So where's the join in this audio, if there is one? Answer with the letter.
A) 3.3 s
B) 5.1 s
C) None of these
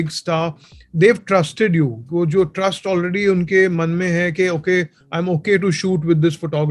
C